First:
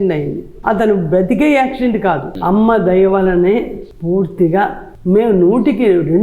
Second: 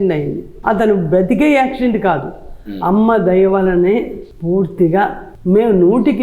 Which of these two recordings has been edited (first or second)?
first